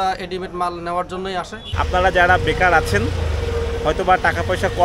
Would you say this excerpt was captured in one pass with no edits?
no; 1 cut; at 1.6 s

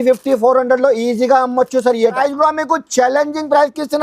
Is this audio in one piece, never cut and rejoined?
no; 1 cut; at 2.2 s

